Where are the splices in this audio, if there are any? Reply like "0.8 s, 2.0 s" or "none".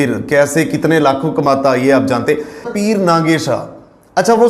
2.7 s